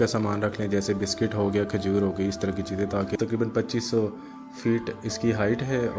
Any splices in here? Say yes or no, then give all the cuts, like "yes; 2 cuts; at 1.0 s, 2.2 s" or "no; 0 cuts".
yes; 1 cut; at 3.1 s